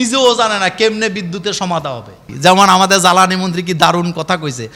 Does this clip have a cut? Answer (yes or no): yes